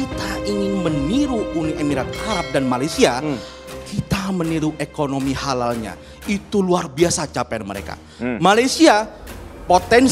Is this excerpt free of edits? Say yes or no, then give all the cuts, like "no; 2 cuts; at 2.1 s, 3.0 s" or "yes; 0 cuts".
yes; 0 cuts